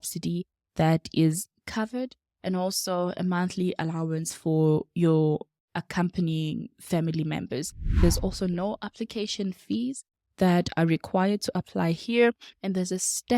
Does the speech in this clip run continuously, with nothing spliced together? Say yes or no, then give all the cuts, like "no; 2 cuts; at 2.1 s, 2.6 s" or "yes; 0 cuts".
no; 1 cut; at 8.0 s